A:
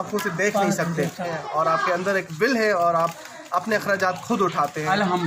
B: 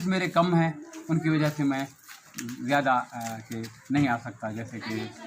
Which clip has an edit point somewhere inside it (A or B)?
A